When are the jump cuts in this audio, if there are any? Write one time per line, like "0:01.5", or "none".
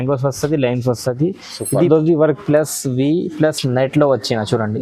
0:01.9